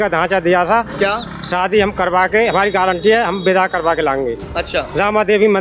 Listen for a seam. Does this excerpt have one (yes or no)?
no